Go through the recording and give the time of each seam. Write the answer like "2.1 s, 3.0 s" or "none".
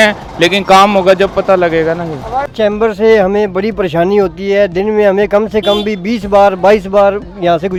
none

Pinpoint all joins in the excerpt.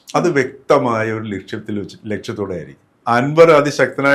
3.0 s

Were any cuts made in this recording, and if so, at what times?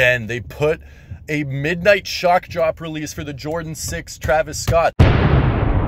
4.9 s

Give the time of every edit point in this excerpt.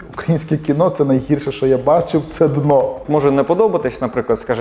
3.0 s

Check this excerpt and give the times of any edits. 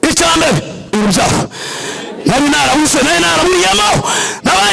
0.9 s

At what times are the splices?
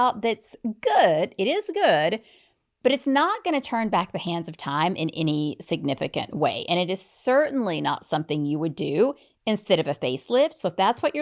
none

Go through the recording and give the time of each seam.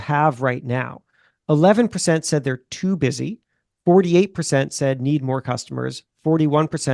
none

